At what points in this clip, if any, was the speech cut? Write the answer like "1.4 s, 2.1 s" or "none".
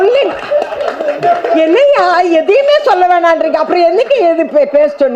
none